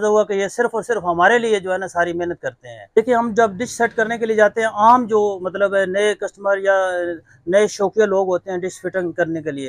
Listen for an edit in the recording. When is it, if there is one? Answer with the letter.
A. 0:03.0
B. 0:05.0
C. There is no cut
A